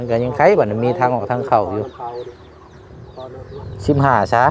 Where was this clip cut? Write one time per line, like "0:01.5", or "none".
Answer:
0:03.3